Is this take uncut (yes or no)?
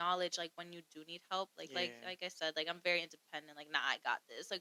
yes